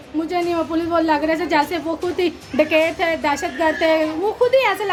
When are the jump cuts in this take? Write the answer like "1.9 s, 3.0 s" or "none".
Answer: none